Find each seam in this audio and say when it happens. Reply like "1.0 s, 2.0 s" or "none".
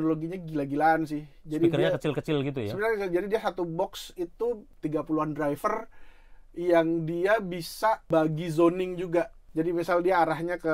4.7 s, 8.0 s, 9.4 s